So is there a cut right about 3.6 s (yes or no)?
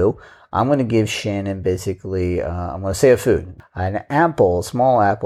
yes